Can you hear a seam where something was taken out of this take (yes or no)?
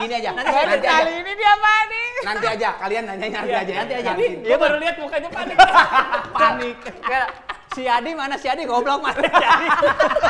no